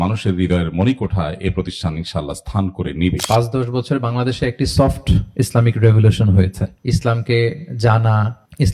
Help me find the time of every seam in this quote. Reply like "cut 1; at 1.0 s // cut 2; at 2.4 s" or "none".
cut 1; at 3.2 s // cut 2; at 6.7 s